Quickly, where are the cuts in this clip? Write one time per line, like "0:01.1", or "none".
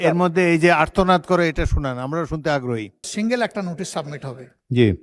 0:03.1